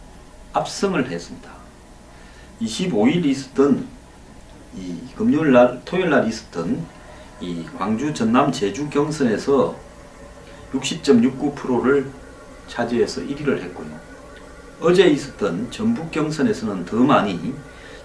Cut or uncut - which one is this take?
uncut